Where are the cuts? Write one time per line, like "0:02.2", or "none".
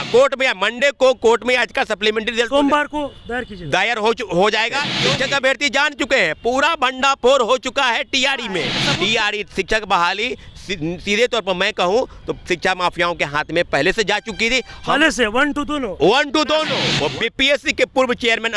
0:04.9
0:08.8
0:16.8